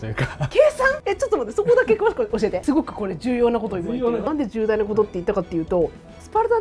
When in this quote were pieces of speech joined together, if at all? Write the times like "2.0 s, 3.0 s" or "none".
2.6 s, 3.8 s